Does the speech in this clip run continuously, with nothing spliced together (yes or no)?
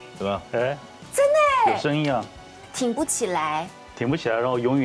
no